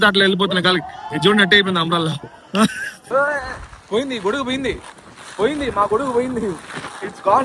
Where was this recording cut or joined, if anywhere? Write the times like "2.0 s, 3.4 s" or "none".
2.9 s